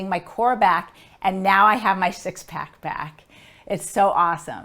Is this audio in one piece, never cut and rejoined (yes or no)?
yes